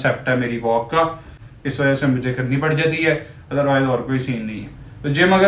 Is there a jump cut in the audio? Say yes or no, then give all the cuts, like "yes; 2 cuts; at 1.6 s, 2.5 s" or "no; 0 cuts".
no; 0 cuts